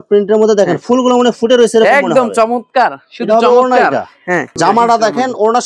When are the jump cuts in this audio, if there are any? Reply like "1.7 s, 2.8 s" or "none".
4.5 s